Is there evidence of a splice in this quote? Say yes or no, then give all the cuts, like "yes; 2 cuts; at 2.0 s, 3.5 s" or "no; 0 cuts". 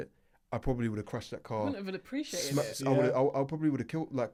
no; 0 cuts